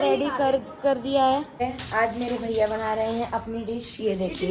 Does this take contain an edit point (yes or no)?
yes